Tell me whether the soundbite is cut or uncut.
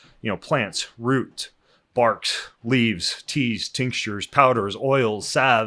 uncut